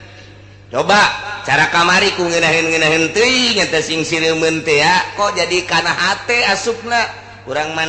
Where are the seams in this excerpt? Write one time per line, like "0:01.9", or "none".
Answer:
none